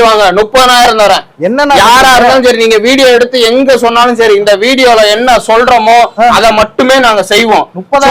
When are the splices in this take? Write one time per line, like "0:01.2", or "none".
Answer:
none